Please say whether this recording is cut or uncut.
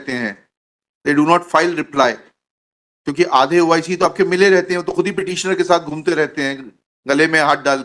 uncut